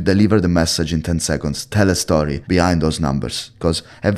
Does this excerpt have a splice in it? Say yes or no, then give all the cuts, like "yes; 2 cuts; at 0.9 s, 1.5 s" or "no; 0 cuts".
yes; 1 cut; at 2.4 s